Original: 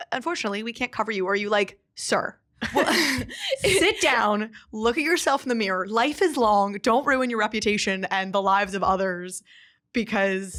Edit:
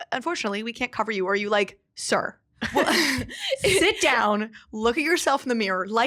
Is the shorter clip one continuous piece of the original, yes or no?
yes